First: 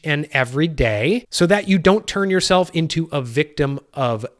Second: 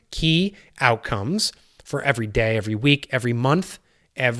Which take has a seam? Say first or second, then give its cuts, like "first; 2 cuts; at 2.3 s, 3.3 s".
first; 1 cut; at 1.3 s